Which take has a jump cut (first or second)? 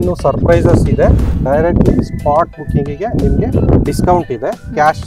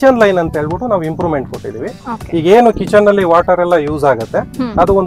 first